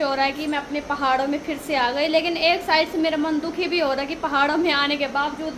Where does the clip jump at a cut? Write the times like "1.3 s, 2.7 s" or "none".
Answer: none

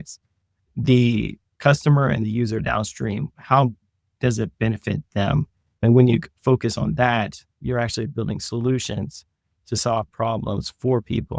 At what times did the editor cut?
7.6 s

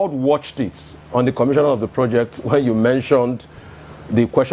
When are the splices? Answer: none

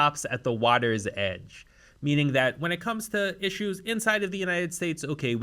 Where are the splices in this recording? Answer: none

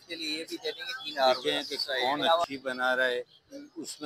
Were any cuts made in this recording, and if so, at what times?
2.4 s

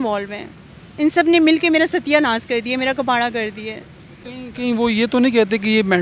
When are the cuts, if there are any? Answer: none

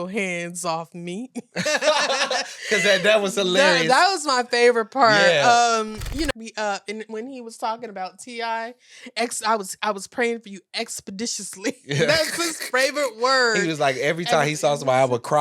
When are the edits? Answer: 6.3 s

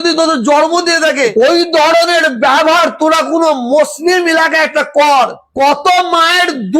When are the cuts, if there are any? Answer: 1.3 s

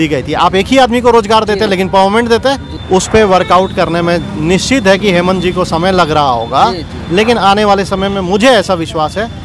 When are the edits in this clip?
2.7 s

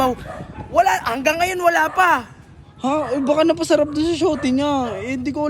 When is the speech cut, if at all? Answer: none

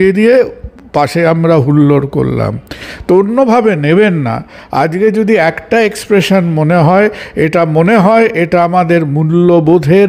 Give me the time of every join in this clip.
none

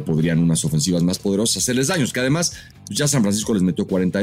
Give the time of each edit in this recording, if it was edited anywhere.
none

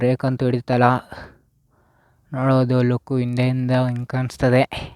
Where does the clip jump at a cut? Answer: none

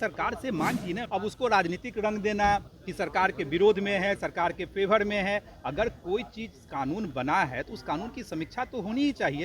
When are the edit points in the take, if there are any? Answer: 1.0 s, 4.6 s

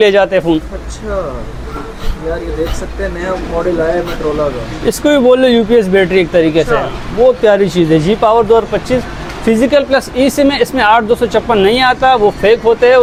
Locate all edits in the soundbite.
none

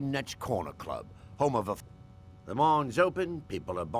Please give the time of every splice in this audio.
1.9 s

